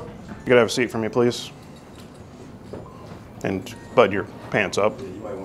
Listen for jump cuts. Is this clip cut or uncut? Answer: uncut